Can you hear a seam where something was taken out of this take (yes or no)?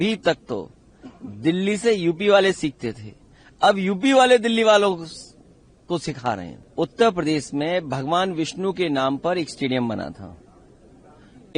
yes